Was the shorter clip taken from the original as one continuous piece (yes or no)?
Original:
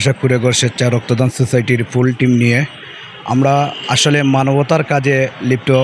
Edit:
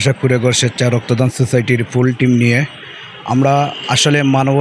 yes